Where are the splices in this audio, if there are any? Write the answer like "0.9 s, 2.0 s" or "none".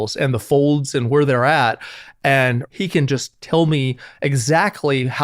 2.7 s